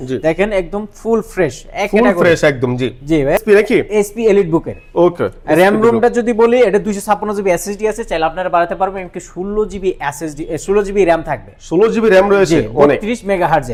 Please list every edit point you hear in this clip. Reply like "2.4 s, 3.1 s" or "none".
none